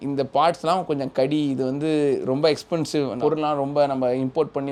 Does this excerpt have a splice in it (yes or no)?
no